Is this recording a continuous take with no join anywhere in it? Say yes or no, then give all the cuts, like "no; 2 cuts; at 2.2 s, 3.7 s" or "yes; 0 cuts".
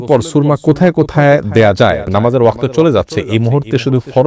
no; 1 cut; at 2.0 s